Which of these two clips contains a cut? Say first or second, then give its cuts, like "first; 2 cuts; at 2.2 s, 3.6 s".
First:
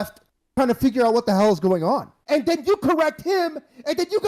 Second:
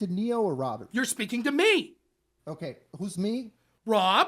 first; 1 cut; at 2.1 s